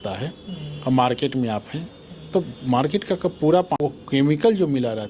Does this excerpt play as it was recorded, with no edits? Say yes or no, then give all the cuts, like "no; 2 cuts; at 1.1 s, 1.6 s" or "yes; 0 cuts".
no; 1 cut; at 3.8 s